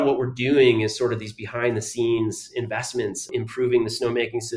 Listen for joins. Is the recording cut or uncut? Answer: uncut